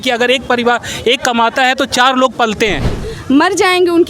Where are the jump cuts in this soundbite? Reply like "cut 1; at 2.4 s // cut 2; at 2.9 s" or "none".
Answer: cut 1; at 2.9 s